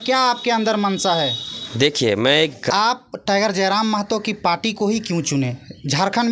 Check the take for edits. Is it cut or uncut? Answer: cut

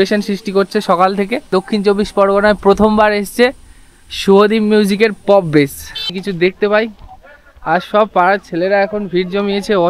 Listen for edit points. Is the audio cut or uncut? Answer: cut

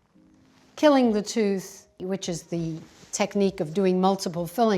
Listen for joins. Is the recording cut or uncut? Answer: cut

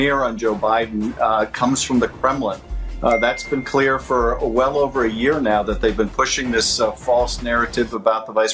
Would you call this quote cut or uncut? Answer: uncut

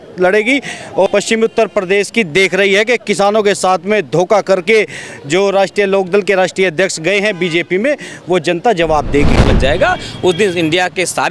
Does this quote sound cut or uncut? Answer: cut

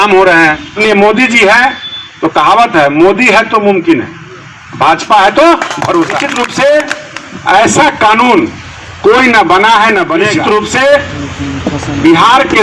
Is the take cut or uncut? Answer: cut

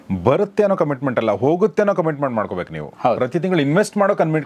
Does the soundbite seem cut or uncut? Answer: uncut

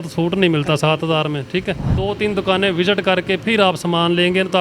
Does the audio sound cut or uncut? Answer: cut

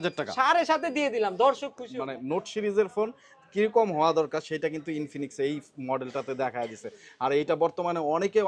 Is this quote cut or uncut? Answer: cut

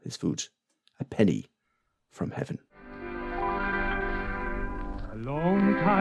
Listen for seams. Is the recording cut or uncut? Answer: cut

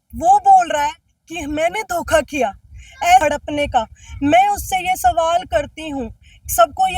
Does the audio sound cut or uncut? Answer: cut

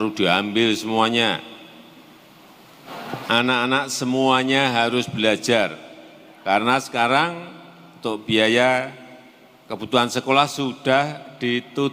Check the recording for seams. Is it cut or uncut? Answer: cut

